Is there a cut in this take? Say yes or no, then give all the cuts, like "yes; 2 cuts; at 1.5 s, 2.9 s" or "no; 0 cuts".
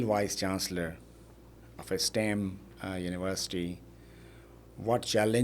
no; 0 cuts